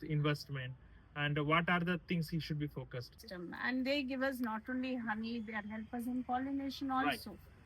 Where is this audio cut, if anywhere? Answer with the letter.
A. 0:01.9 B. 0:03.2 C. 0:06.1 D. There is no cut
B